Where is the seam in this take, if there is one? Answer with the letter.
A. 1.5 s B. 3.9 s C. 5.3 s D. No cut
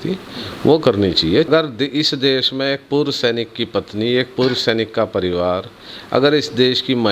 A